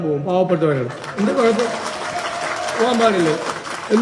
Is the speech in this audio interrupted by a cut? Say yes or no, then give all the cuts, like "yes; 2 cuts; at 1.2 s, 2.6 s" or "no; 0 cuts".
no; 0 cuts